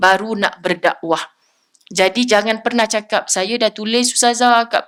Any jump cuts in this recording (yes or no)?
no